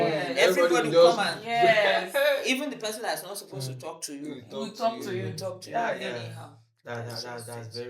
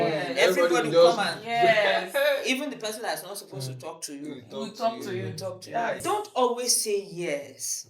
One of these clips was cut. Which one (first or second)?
second